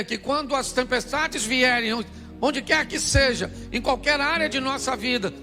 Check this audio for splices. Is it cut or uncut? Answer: uncut